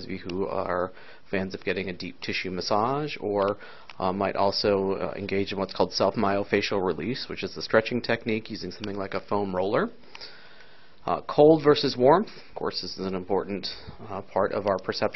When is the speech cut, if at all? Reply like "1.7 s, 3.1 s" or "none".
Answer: 10.1 s